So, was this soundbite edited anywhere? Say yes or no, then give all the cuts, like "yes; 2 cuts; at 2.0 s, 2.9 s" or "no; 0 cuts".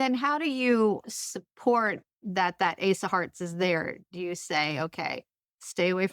yes; 2 cuts; at 1.0 s, 2.1 s